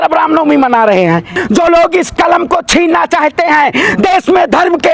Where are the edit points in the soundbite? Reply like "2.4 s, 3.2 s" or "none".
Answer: 1.4 s